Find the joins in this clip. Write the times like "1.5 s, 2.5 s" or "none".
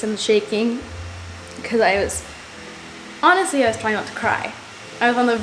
none